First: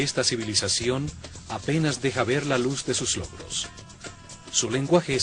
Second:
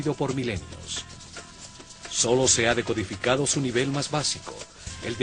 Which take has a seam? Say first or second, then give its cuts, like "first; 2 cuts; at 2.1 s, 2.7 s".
first; 1 cut; at 1.7 s